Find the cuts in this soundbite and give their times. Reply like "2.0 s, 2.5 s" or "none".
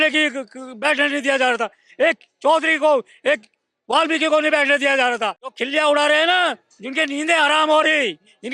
5.4 s